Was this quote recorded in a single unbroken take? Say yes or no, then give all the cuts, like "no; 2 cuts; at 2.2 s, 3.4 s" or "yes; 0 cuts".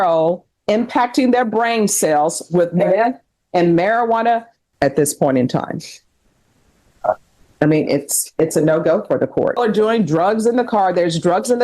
no; 2 cuts; at 4.6 s, 9.6 s